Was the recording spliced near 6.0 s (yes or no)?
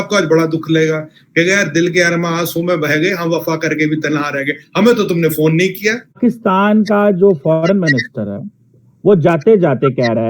no